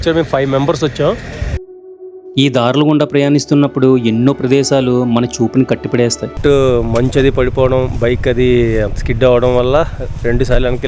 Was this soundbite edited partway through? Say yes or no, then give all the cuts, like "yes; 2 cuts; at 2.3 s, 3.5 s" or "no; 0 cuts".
yes; 2 cuts; at 1.7 s, 6.4 s